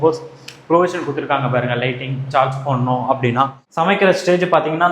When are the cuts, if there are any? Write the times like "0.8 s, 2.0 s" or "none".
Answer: 3.6 s